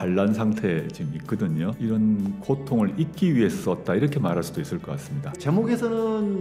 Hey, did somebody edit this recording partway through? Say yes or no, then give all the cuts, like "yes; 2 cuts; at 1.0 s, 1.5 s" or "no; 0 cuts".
yes; 2 cuts; at 1.8 s, 5.4 s